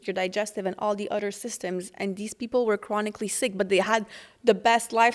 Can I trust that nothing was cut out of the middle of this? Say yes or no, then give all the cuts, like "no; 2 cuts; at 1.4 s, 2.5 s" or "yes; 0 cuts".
yes; 0 cuts